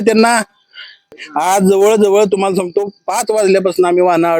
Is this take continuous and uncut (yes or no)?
no